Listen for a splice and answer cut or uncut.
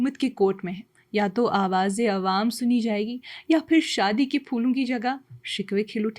uncut